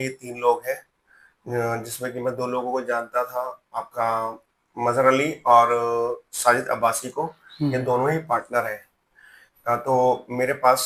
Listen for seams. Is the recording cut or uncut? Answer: uncut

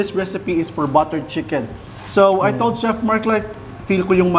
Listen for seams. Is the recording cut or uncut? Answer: uncut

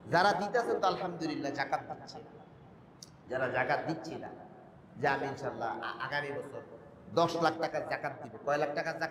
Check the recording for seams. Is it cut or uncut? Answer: uncut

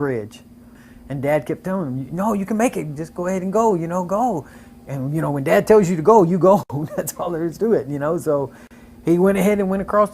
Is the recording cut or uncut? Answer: cut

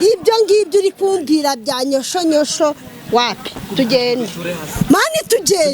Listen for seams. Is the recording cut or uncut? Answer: uncut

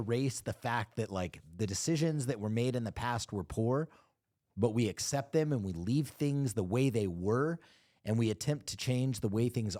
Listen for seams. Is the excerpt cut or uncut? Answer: uncut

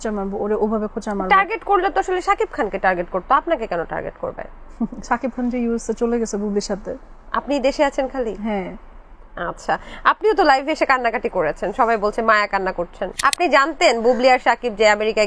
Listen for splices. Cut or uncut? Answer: cut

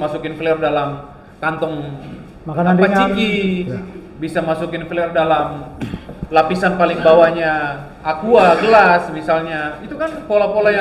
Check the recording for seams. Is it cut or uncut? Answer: uncut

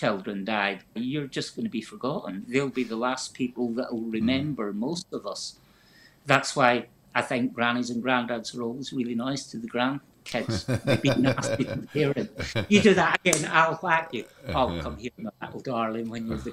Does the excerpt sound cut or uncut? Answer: cut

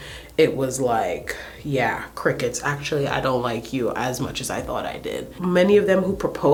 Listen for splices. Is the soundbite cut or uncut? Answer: uncut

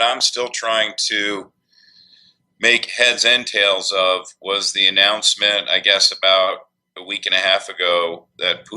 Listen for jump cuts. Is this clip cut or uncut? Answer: cut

